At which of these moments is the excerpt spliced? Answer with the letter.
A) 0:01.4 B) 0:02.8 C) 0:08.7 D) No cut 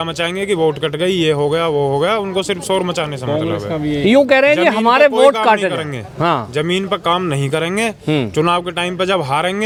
D